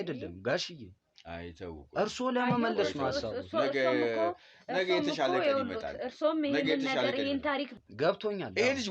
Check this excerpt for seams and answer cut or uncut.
cut